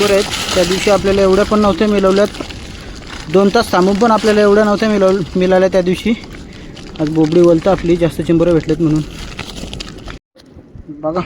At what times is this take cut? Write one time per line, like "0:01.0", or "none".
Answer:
0:10.2